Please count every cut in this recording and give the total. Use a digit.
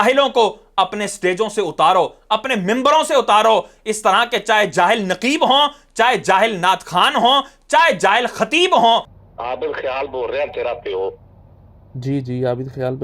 1